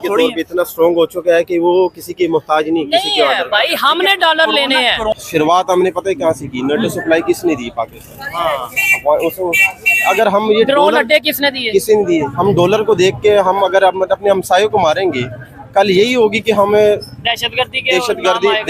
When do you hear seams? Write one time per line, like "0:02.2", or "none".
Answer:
0:05.2